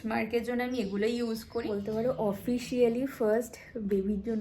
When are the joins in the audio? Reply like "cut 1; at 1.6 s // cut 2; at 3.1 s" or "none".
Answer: cut 1; at 1.8 s